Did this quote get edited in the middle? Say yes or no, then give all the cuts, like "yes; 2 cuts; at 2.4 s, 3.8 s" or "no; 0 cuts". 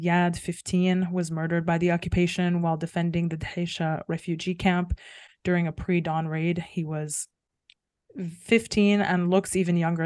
no; 0 cuts